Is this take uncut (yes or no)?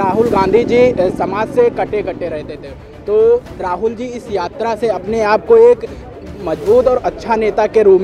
yes